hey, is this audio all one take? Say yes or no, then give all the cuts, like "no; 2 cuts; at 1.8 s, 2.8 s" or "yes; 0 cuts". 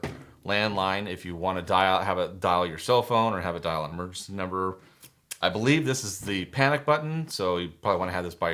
yes; 0 cuts